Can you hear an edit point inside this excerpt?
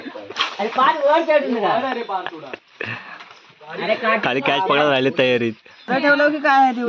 yes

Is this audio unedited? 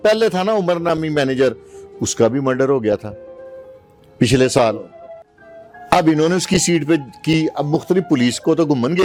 yes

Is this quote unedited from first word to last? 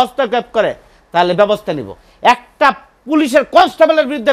yes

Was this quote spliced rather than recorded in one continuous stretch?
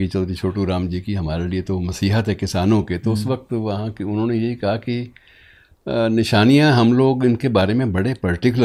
no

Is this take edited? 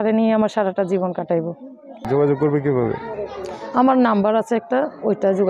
yes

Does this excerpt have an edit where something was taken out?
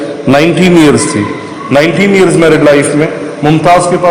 no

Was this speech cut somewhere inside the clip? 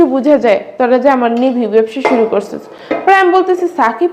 no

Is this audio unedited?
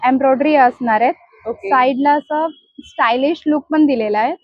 yes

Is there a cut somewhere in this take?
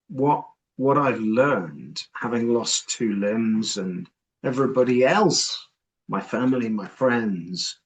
no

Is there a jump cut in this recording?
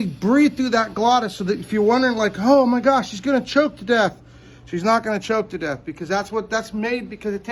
no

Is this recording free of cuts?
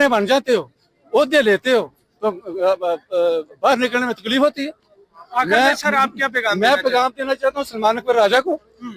yes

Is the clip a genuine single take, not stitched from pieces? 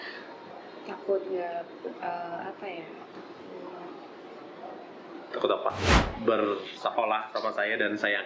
no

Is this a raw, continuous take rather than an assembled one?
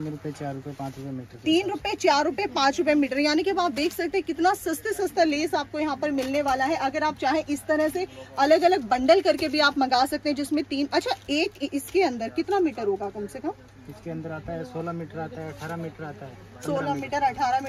yes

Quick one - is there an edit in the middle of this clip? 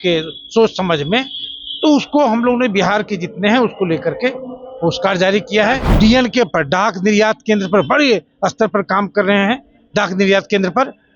yes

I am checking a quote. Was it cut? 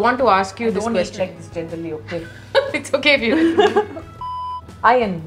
yes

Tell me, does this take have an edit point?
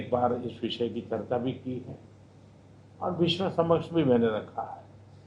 no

